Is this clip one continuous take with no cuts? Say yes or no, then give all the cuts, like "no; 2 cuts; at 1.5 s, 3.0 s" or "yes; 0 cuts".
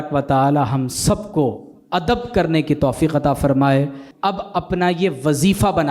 no; 1 cut; at 4.0 s